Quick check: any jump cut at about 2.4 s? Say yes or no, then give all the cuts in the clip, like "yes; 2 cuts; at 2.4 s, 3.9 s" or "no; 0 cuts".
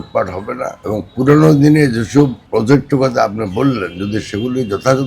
yes; 1 cut; at 2.4 s